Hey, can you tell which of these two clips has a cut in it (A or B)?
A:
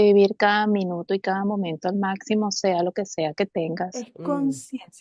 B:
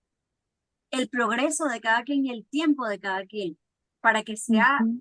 A